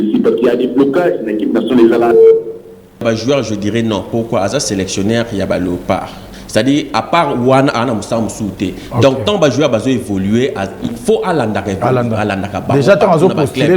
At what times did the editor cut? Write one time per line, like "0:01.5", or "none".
0:03.0